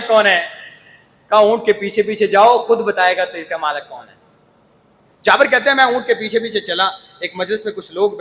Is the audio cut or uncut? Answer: uncut